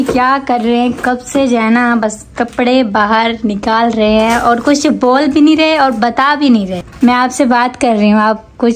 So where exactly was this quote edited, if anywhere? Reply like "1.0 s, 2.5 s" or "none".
none